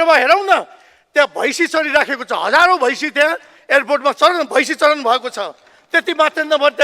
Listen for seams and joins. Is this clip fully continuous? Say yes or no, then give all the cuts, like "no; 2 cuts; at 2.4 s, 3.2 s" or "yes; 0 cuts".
yes; 0 cuts